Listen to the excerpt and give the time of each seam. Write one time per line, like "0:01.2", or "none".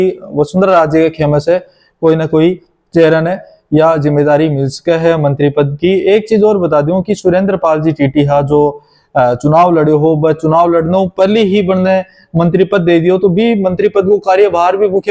none